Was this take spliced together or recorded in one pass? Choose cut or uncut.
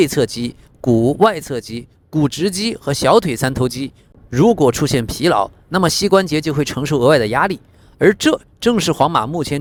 uncut